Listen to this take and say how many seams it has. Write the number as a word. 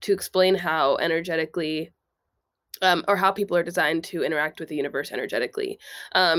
zero